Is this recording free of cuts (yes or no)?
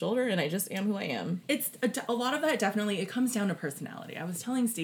no